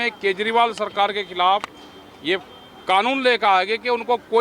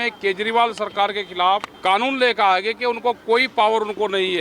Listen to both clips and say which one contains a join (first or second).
second